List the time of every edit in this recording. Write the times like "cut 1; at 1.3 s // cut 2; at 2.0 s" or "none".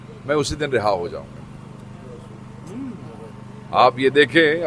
none